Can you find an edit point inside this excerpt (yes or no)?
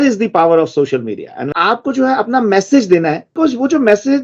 yes